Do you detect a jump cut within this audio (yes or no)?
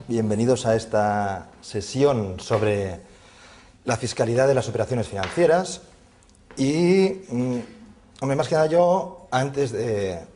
yes